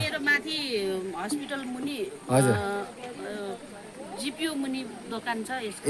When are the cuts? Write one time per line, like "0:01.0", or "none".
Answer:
none